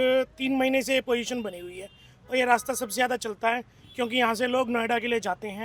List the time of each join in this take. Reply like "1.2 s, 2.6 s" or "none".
none